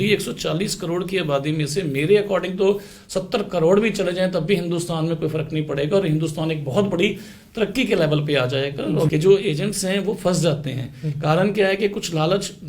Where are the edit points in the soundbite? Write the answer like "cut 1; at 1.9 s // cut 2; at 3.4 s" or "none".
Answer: cut 1; at 9.1 s